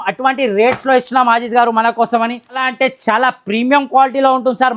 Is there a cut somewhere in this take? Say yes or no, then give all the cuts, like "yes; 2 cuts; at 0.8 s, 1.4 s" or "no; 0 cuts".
yes; 1 cut; at 2.7 s